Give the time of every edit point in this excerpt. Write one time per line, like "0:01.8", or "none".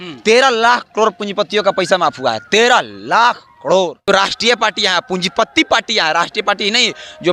0:04.1